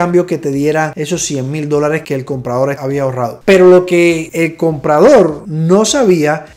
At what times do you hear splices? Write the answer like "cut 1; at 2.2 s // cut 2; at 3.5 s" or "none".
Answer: none